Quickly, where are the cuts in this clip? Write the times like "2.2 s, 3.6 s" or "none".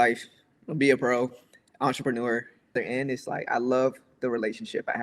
2.7 s